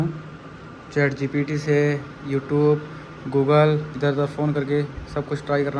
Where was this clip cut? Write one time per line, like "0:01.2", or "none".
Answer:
none